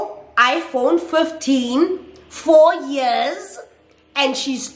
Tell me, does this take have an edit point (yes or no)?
no